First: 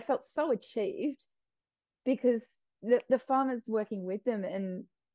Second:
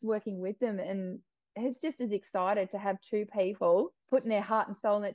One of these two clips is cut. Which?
second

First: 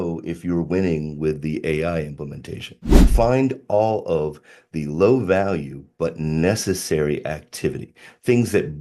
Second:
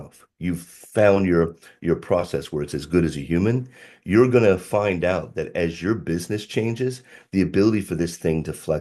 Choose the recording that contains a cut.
first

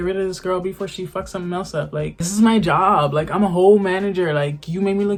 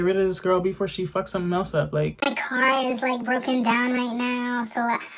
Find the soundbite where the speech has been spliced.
second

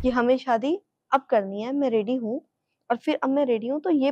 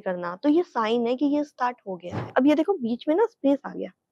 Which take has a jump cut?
second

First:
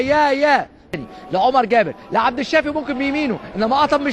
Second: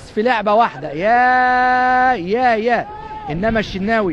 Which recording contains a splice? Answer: second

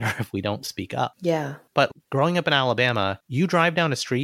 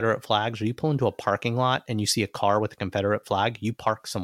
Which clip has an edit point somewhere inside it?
first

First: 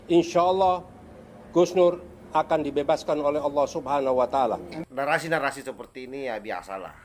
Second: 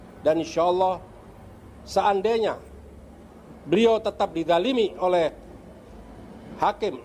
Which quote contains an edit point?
first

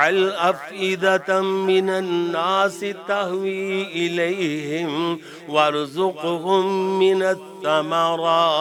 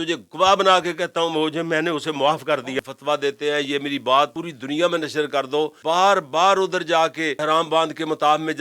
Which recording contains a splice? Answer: second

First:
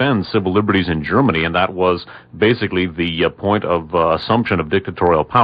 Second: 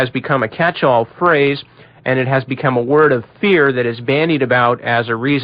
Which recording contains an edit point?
first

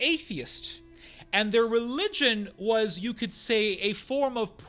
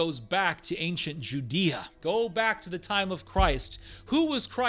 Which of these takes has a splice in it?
second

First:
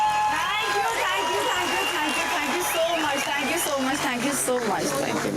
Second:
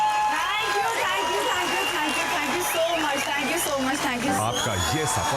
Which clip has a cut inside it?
second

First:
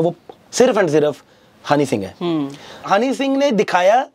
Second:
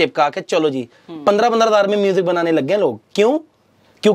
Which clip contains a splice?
first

